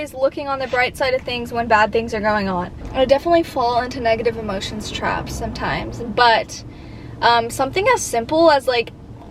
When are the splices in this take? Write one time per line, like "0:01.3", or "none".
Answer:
none